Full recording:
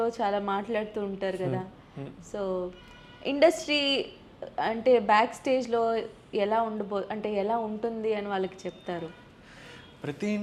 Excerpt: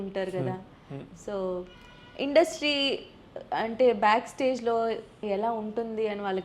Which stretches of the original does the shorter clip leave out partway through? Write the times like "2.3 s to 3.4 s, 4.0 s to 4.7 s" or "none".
6.3 s to 7.3 s